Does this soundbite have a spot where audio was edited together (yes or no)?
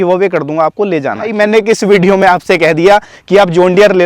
yes